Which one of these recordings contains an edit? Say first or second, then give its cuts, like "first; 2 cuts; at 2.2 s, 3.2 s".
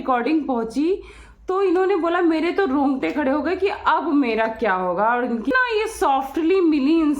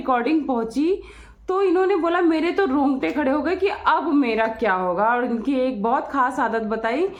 first; 1 cut; at 5.5 s